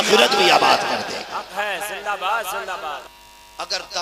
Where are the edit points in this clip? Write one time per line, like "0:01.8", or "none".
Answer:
0:03.1